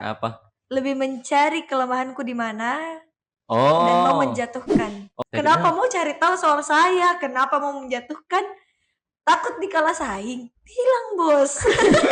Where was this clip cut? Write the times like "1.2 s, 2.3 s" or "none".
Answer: 5.0 s